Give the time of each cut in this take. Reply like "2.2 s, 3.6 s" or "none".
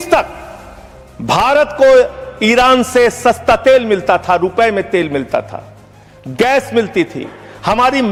none